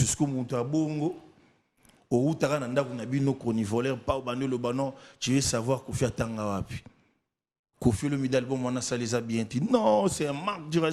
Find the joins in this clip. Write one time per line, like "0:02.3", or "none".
none